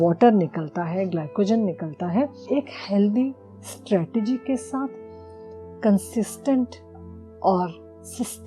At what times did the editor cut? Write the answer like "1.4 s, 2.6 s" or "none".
2.4 s